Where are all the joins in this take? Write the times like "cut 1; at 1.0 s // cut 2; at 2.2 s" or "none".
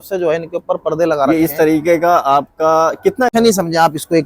cut 1; at 3.3 s